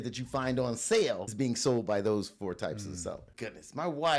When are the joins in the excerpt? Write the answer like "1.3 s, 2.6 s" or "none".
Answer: 1.3 s, 3.3 s